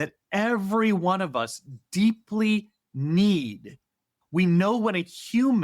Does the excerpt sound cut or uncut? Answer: cut